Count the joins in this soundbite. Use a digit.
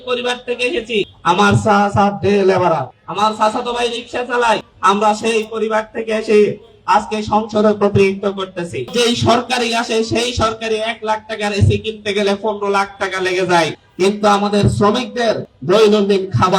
6